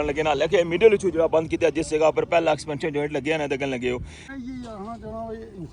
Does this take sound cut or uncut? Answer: cut